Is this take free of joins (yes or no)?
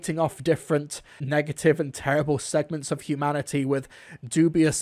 yes